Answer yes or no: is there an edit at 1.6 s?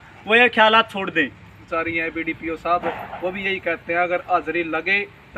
yes